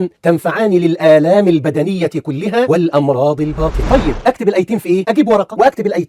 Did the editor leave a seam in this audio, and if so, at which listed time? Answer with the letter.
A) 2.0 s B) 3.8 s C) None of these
B